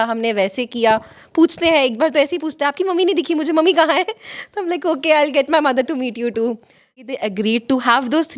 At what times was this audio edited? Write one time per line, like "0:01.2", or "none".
0:06.9